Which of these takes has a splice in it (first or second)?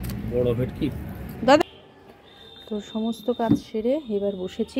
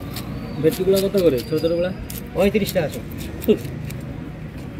first